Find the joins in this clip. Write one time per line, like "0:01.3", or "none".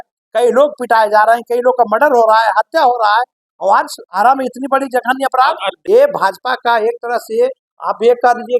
0:05.7